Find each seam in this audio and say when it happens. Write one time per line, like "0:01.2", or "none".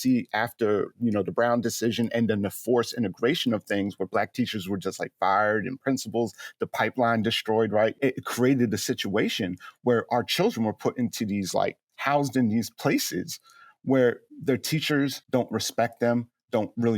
0:08.0
0:15.2